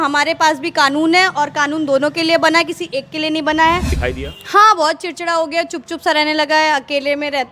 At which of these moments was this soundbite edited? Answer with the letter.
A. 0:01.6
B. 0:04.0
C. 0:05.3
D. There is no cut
B